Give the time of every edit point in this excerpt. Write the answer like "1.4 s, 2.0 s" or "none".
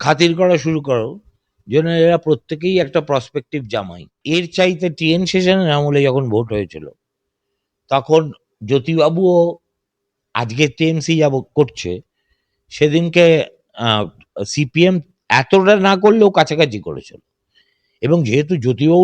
4.1 s